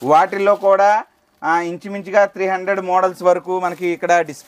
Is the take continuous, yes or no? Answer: yes